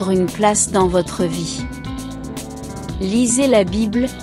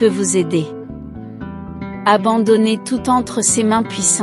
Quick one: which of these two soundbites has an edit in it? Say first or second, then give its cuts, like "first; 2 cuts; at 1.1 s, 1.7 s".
first; 2 cuts; at 1.5 s, 3.0 s